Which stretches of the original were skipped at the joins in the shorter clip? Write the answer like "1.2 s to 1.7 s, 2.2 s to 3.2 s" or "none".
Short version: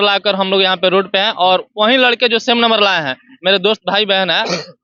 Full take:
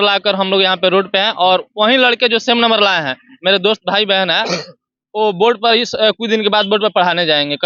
none